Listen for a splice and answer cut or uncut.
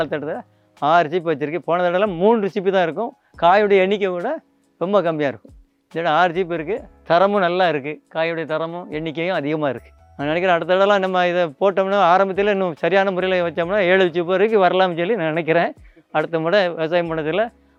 uncut